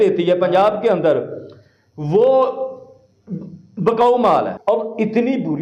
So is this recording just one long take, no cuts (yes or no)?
no